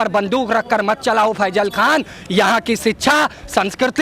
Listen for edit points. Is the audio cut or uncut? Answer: uncut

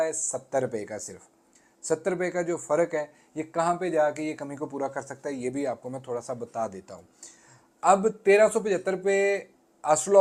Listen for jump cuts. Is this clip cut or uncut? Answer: uncut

